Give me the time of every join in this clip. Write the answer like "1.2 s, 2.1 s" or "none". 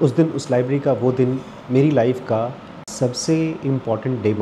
2.9 s